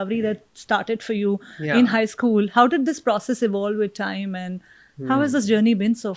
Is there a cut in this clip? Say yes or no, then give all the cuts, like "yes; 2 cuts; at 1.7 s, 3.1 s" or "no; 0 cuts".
no; 0 cuts